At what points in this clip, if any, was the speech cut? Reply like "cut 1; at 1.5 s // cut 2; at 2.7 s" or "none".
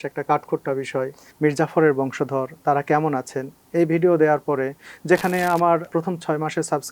cut 1; at 1.2 s // cut 2; at 5.9 s